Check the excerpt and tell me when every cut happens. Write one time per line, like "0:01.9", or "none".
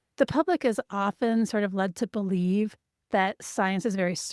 none